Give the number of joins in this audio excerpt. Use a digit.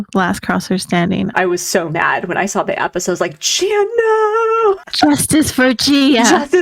2